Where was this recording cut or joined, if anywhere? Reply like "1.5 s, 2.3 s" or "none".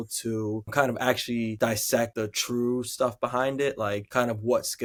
none

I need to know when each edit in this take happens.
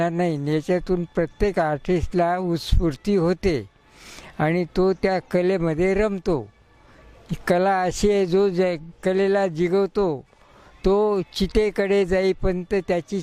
none

